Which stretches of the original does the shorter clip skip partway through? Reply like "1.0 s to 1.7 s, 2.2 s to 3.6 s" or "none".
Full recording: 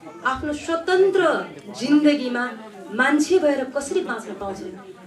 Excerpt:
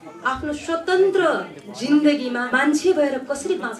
2.5 s to 2.9 s